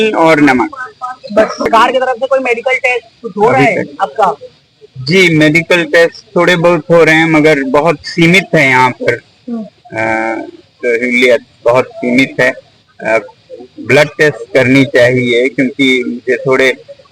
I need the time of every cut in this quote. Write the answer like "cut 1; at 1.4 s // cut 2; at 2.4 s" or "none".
cut 1; at 1.7 s